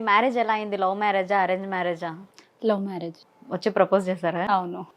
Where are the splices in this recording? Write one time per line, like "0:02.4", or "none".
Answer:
0:03.2